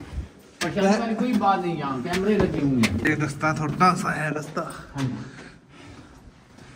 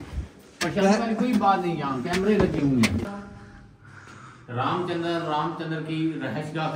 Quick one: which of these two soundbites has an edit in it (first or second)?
second